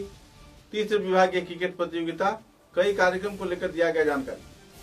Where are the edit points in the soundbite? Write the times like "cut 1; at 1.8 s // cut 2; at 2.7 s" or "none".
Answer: none